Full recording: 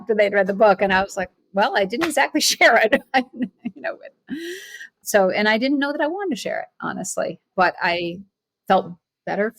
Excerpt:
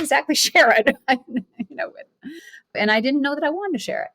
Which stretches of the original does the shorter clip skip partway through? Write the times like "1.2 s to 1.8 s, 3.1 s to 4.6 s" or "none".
4.8 s to 5.3 s